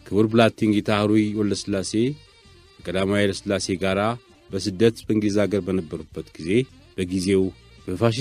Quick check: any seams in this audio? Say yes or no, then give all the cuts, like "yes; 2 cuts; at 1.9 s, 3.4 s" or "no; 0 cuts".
yes; 1 cut; at 6.8 s